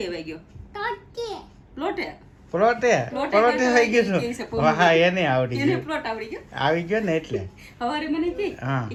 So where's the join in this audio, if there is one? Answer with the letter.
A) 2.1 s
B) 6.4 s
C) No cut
C